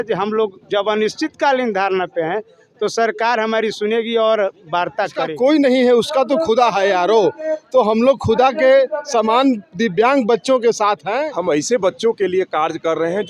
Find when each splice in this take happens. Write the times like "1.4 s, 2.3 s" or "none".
5.2 s, 11.3 s